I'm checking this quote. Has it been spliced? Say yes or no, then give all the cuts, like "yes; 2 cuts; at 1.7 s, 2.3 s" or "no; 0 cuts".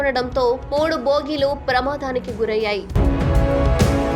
yes; 1 cut; at 3.0 s